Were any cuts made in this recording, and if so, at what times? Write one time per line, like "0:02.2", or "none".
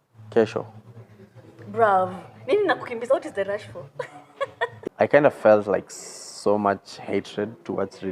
0:04.8